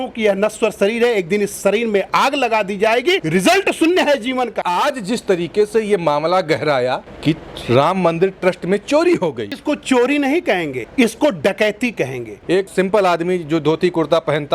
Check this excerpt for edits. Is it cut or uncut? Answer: cut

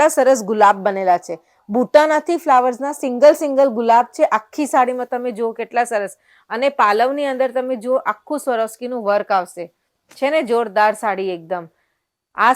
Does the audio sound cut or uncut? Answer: uncut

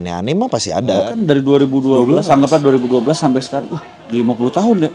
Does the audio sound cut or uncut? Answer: cut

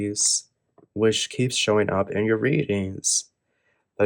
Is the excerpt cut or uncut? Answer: uncut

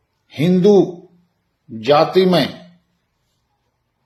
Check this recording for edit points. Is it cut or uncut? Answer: uncut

